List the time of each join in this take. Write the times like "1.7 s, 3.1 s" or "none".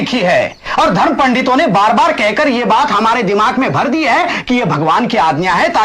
none